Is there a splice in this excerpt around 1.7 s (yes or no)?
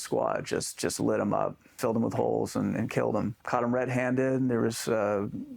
yes